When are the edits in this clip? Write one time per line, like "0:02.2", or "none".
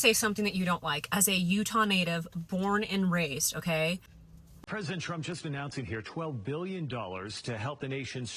0:04.6